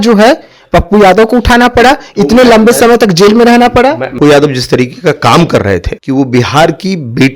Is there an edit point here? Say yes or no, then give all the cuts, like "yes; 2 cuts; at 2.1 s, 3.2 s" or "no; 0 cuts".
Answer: yes; 2 cuts; at 4.2 s, 5.9 s